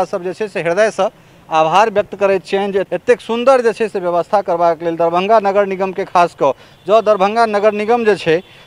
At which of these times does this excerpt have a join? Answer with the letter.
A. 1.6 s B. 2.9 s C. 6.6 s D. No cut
B